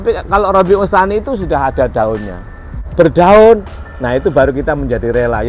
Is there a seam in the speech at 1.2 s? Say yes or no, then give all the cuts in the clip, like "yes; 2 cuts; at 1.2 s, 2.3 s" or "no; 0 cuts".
no; 1 cut; at 2.8 s